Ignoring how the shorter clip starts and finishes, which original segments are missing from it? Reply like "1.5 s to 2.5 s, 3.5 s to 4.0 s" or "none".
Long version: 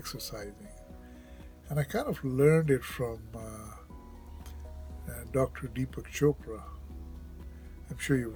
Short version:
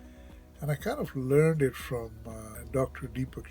3.6 s to 5.1 s